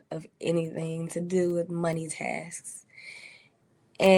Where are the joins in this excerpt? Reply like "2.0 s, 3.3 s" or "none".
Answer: none